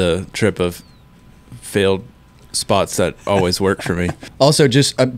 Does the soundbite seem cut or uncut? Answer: cut